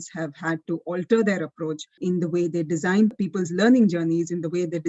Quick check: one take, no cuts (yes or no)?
no